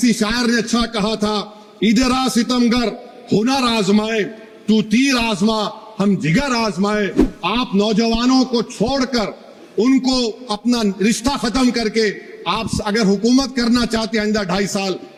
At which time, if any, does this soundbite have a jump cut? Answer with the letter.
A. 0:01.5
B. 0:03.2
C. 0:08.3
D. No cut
D